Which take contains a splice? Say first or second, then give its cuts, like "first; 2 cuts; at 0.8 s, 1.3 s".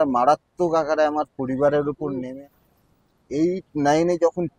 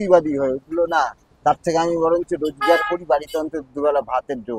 first; 1 cut; at 2.3 s